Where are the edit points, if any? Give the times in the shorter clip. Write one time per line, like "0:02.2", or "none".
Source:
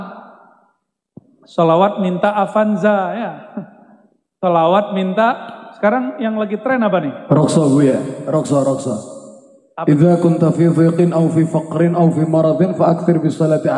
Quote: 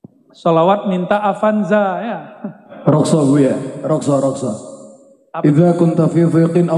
0:02.7